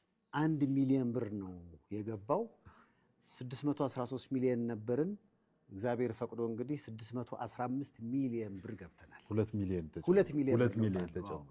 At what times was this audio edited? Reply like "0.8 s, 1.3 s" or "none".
none